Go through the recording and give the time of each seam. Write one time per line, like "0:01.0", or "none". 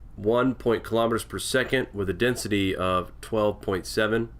0:02.5